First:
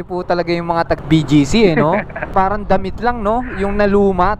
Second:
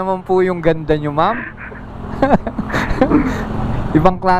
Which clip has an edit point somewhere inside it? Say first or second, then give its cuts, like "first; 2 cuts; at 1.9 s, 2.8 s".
first; 2 cuts; at 1.0 s, 2.2 s